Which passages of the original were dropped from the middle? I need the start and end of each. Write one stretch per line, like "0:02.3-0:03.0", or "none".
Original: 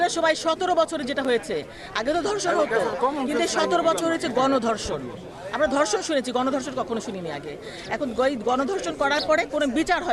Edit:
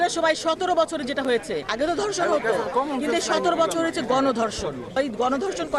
0:01.7-0:01.9
0:05.2-0:08.2